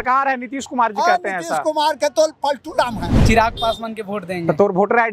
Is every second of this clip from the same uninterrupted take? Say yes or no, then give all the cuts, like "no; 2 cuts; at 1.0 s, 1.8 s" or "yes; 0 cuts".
no; 1 cut; at 3.1 s